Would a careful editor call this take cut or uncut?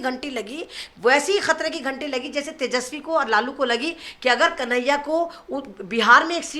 uncut